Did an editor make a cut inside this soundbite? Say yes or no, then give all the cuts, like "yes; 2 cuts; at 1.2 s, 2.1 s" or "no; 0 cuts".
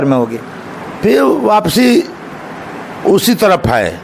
no; 0 cuts